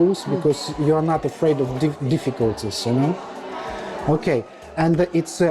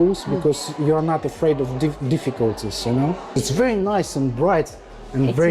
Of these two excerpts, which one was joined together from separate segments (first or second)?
second